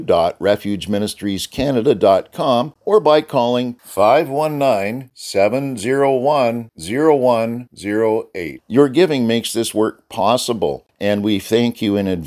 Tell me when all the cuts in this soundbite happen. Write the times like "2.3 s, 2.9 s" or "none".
2.7 s, 10.9 s